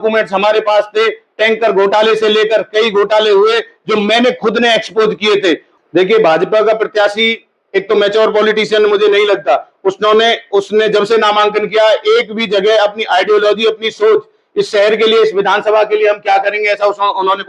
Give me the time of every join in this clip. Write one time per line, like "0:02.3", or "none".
0:05.7